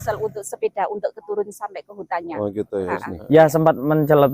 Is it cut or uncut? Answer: cut